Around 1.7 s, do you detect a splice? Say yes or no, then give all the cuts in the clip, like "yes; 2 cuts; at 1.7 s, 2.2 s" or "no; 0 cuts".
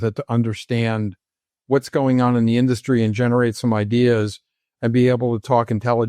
no; 0 cuts